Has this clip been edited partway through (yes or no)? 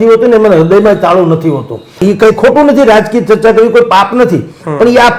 yes